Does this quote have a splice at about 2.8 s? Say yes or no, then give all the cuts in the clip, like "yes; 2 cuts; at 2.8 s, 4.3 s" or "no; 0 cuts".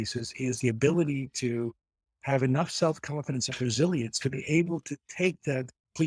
no; 0 cuts